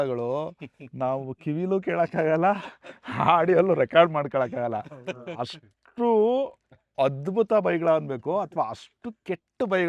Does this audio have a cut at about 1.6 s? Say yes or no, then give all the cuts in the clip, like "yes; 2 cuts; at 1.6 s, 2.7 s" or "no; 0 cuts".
no; 0 cuts